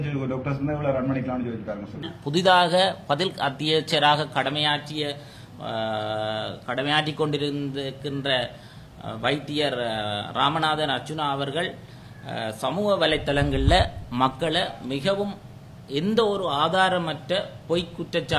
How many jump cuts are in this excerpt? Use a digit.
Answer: 1